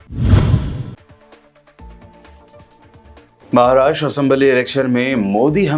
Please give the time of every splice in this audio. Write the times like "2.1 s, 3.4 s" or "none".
3.0 s